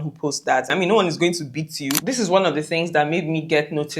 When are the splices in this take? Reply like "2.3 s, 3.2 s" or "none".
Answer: 0.7 s, 2.0 s